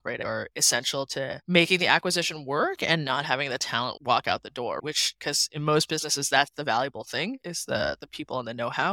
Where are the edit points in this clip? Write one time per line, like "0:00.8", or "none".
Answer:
none